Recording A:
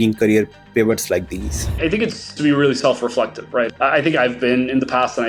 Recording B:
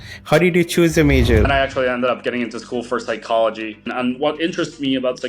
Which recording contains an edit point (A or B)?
B